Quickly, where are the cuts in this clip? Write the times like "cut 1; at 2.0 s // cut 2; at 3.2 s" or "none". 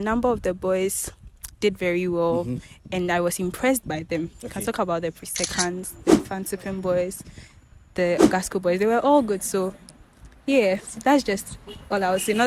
none